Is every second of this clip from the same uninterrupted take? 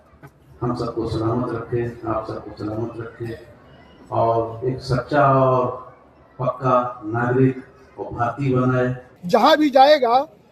no; 1 cut; at 9.1 s

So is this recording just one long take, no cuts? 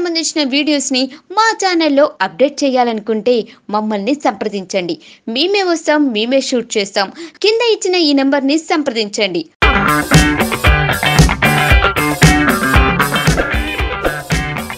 yes; 0 cuts

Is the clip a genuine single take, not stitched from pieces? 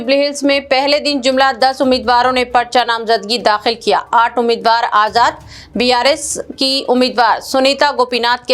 yes; 0 cuts

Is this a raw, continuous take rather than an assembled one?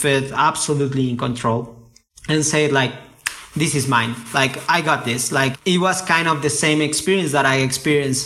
no; 1 cut; at 5.6 s

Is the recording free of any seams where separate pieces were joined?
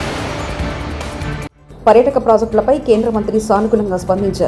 no; 1 cut; at 1.6 s

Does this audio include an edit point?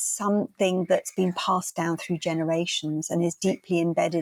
no; 0 cuts

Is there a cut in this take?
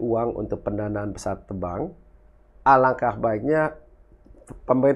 no; 0 cuts

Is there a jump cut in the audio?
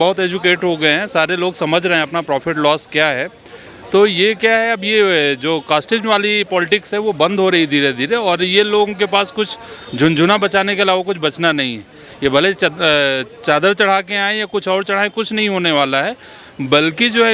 no; 0 cuts

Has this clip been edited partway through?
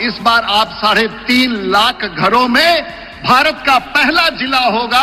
no; 0 cuts

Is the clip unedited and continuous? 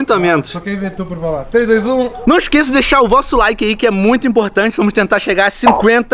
no; 1 cut; at 2.2 s

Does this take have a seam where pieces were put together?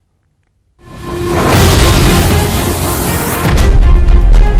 no; 0 cuts

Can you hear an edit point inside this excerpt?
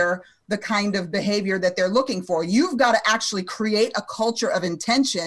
no; 0 cuts

